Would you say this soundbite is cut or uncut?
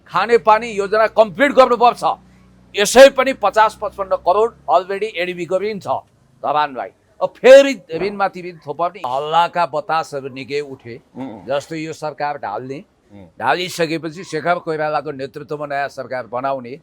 cut